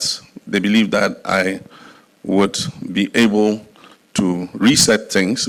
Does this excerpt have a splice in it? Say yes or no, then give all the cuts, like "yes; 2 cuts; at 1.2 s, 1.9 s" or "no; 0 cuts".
no; 0 cuts